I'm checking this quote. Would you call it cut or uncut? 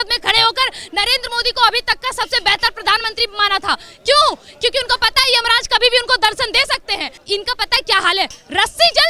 cut